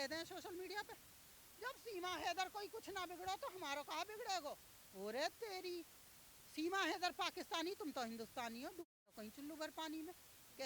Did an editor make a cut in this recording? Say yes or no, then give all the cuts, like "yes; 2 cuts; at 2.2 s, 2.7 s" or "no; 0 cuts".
no; 0 cuts